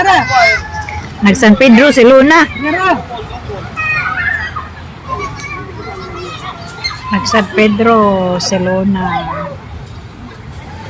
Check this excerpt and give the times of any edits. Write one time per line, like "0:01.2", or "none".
0:05.1